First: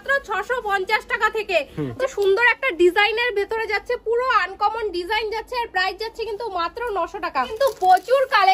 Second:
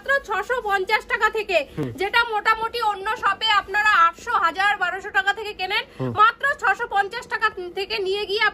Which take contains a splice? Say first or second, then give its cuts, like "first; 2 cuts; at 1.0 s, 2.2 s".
first; 2 cuts; at 1.9 s, 7.5 s